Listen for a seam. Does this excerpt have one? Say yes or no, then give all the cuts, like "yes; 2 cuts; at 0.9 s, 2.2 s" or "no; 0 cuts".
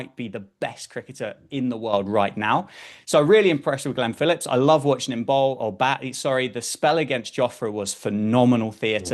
no; 0 cuts